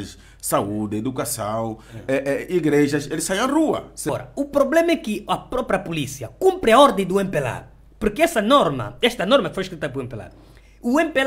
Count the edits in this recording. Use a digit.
1